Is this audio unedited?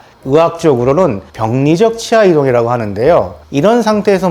no; 1 cut; at 3.4 s

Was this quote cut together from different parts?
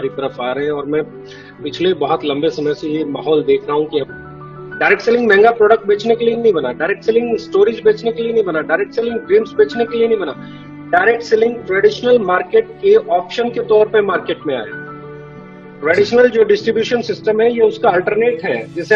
yes; 1 cut; at 4.2 s

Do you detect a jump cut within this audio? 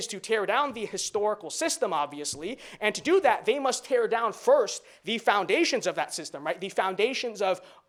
no; 0 cuts

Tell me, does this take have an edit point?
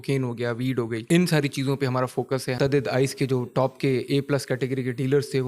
yes; 2 cuts; at 1.0 s, 2.6 s

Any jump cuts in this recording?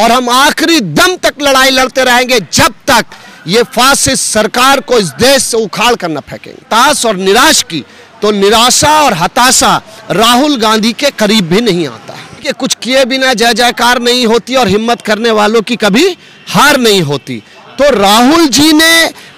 yes; 2 cuts; at 6.6 s, 12.6 s

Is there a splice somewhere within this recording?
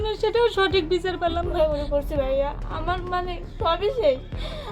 yes; 1 cut; at 1.4 s

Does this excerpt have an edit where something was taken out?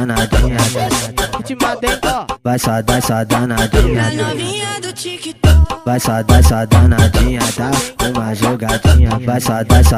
no; 0 cuts

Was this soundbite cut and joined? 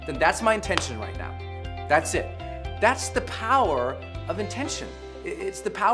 no; 0 cuts

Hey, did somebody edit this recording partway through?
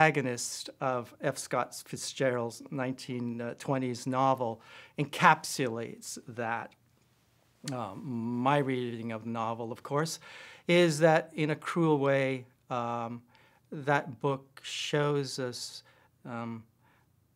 no; 0 cuts

